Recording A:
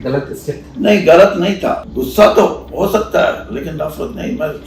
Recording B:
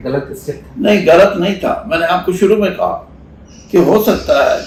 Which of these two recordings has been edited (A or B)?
A